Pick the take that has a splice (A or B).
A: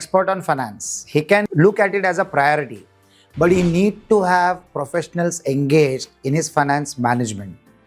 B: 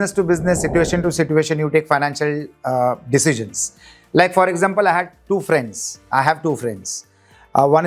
A